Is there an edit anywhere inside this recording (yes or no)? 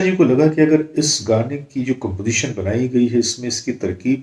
no